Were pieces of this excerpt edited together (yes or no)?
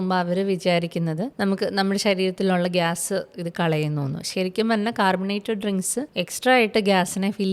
yes